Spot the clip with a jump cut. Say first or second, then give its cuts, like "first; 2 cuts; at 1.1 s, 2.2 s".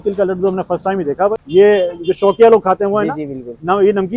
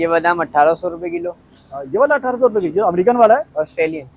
first; 1 cut; at 1.4 s